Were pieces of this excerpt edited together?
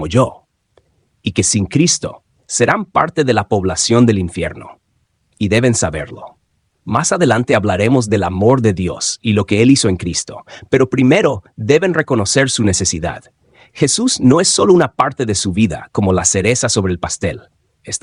no; 0 cuts

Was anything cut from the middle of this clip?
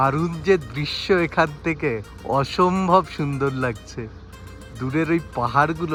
no; 0 cuts

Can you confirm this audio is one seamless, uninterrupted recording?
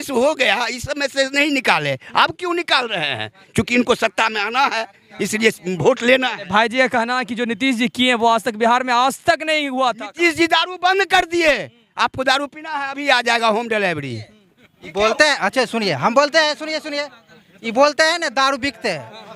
yes; 0 cuts

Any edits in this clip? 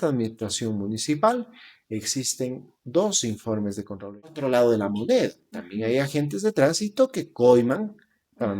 yes; 1 cut; at 4.4 s

